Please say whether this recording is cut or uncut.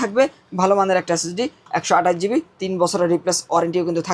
uncut